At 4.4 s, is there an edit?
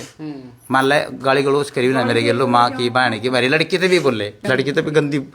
yes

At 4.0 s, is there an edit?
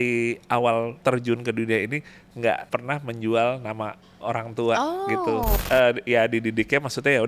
no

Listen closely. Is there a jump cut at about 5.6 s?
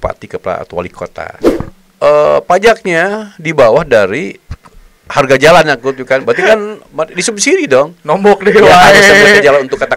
no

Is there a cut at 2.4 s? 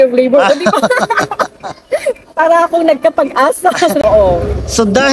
no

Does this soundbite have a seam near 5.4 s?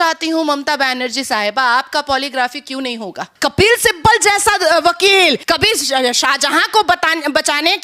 yes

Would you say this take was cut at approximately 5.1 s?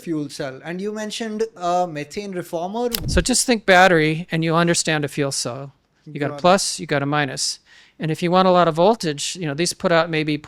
no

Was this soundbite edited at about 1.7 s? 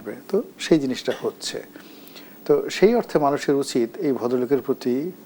no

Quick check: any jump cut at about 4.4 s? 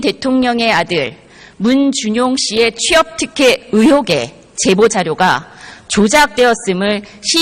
yes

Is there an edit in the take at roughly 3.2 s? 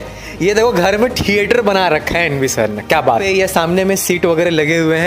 yes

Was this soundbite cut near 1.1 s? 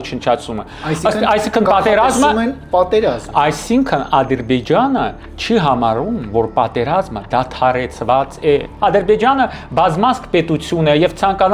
no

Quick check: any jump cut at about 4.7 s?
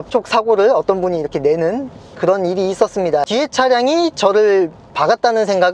no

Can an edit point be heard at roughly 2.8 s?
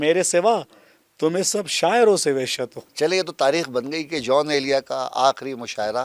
yes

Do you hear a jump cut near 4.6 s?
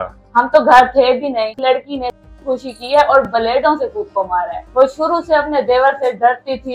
yes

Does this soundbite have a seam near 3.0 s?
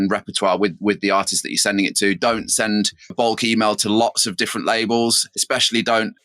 no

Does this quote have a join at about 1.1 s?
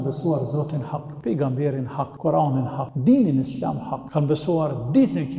yes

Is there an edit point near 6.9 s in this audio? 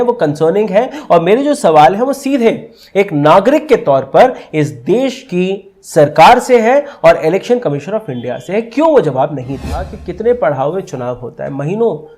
no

